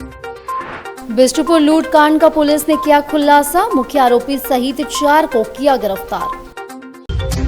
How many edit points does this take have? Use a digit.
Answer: 1